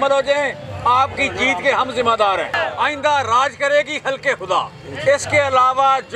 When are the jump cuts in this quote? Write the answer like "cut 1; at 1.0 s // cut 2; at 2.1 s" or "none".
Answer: cut 1; at 2.5 s